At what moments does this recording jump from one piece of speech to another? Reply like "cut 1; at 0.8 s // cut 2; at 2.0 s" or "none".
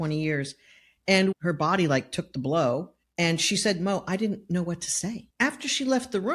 cut 1; at 0.9 s // cut 2; at 3.0 s // cut 3; at 5.3 s